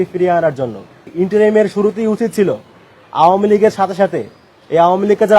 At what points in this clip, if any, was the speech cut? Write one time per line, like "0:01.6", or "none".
0:01.1